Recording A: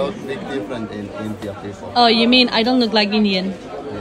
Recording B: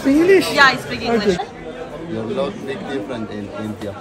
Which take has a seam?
B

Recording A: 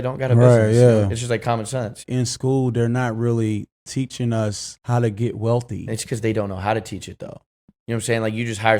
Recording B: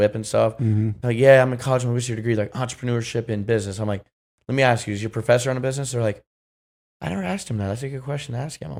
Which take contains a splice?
A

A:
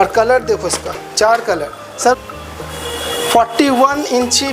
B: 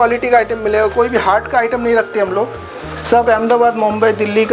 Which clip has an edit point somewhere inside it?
A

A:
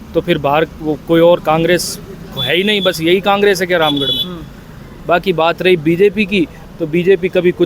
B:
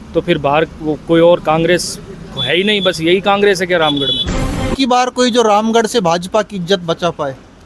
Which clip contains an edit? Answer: B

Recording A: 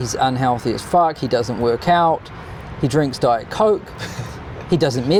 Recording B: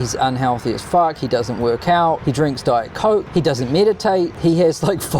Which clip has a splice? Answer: B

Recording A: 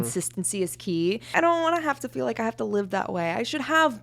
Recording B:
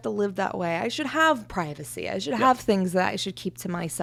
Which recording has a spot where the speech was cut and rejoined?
A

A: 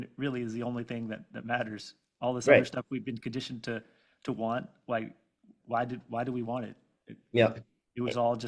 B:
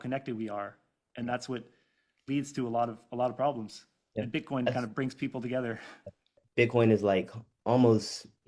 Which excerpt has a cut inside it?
B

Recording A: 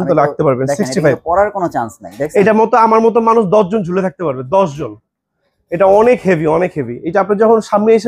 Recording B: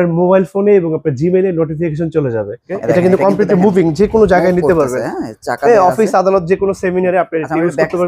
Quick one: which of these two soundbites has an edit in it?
B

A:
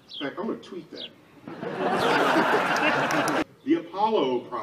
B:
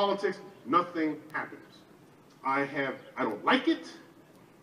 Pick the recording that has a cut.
A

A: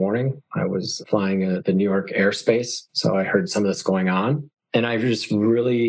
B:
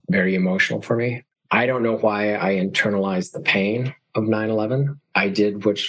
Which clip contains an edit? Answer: B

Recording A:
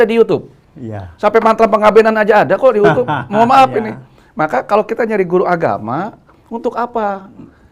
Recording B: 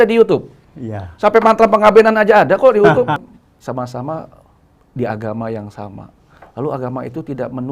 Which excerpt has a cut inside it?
B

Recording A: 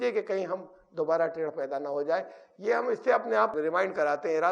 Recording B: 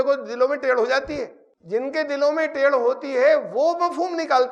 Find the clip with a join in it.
A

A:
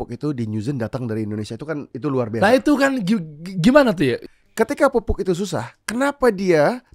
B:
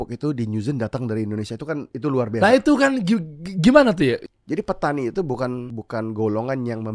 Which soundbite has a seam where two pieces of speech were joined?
B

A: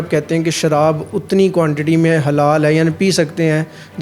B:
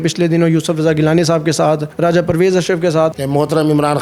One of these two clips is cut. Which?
B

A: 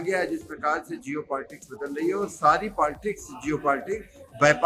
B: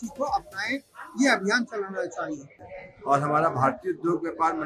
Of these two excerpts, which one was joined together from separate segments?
B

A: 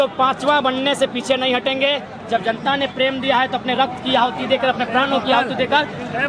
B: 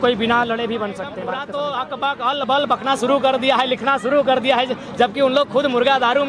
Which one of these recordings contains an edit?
B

